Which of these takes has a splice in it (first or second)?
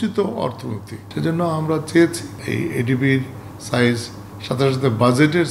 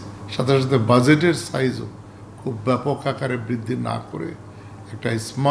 first